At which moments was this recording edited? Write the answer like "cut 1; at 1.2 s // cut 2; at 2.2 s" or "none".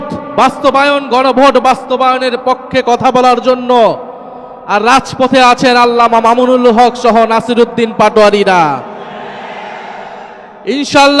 none

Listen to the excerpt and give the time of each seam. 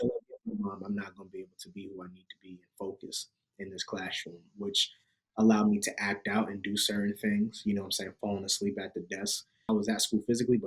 cut 1; at 9.6 s

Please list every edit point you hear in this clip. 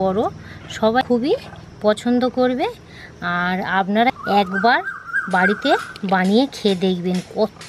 cut 1; at 1.0 s // cut 2; at 4.2 s

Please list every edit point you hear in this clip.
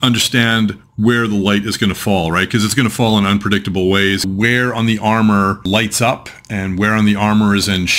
cut 1; at 4.3 s // cut 2; at 5.6 s

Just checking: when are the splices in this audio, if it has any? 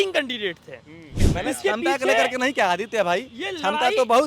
cut 1; at 1.2 s

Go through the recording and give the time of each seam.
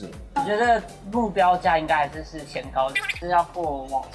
cut 1; at 3.0 s

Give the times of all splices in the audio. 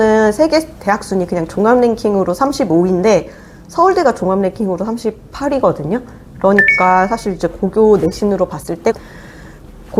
none

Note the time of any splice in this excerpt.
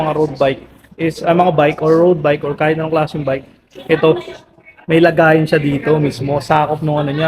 none

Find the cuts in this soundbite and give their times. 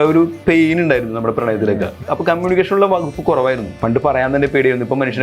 cut 1; at 2.0 s // cut 2; at 3.7 s

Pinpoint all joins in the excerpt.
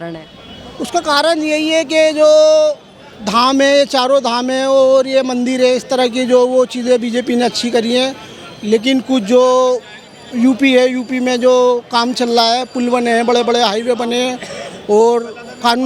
none

